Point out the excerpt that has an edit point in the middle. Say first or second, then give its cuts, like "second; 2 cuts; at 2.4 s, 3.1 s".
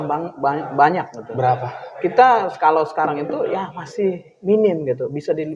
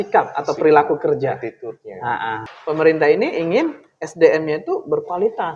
second; 1 cut; at 2.4 s